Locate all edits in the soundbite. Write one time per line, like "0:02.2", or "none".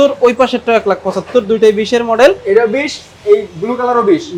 none